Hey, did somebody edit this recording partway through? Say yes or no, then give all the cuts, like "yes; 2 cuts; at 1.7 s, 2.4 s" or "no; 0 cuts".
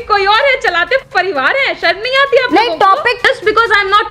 yes; 1 cut; at 3.2 s